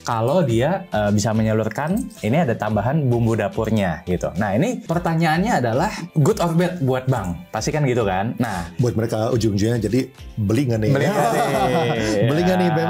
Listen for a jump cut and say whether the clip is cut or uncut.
cut